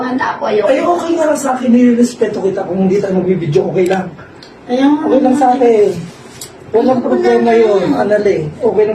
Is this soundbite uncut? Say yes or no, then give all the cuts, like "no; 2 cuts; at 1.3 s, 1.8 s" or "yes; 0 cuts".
yes; 0 cuts